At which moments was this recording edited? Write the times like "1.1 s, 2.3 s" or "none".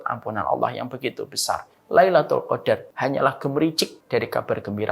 1.7 s, 2.9 s, 3.9 s